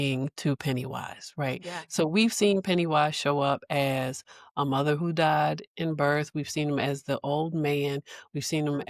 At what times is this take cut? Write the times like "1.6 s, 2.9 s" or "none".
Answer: none